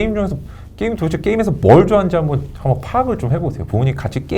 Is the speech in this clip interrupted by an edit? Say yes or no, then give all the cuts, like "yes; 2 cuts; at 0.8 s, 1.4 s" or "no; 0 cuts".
no; 0 cuts